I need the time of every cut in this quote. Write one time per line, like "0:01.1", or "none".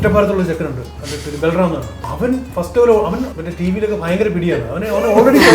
0:02.0
0:03.3